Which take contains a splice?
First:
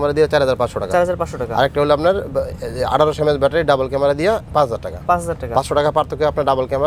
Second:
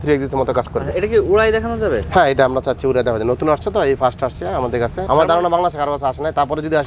second; 1 cut; at 5.0 s

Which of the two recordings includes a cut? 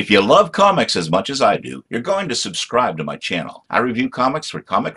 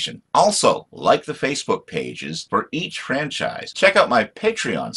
second; 1 cut; at 3.6 s

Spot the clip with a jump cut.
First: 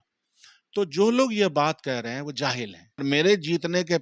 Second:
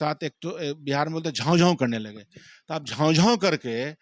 first; 1 cut; at 3.0 s

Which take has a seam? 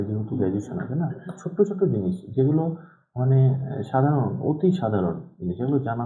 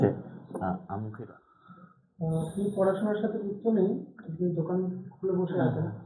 second; 1 cut; at 1.2 s

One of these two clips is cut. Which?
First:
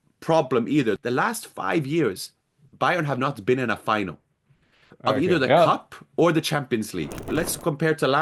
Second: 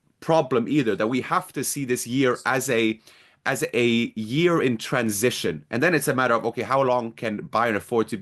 first; 2 cuts; at 1.0 s, 7.3 s

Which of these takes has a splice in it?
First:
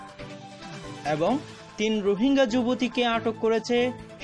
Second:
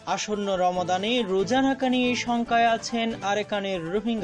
first; 1 cut; at 1.0 s

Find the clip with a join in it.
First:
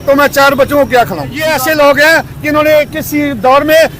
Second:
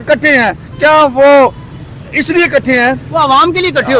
first; 1 cut; at 1.4 s

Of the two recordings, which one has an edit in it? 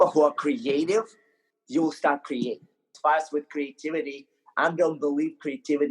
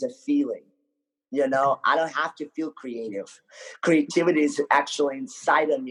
first; 1 cut; at 3.0 s

